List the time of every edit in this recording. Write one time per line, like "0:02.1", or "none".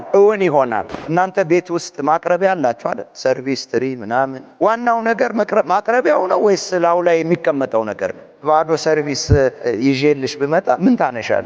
0:00.9
0:04.4
0:08.4
0:09.6